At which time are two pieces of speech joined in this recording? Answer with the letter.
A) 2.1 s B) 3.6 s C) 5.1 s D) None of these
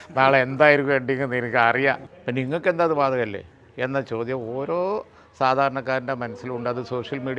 A